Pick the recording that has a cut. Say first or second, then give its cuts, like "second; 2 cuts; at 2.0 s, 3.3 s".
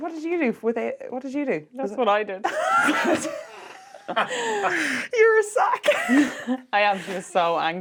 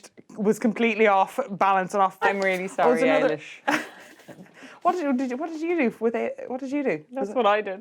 second; 1 cut; at 2.2 s